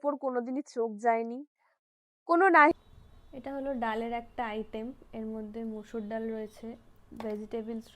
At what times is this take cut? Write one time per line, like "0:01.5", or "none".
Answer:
0:02.7